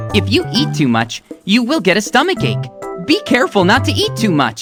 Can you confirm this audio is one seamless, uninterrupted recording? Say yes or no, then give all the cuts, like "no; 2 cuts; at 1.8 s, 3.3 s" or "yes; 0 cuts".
yes; 0 cuts